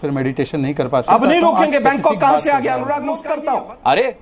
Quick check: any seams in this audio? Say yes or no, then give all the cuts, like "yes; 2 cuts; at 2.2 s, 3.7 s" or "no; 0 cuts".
yes; 2 cuts; at 1.0 s, 3.2 s